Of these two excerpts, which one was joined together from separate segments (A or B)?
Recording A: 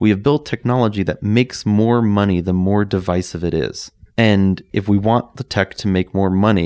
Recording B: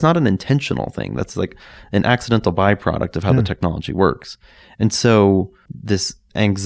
B